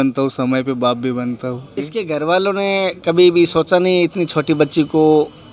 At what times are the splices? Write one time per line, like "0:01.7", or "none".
0:01.8